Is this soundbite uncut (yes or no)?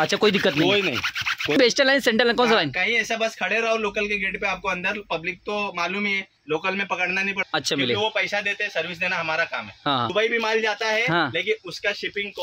no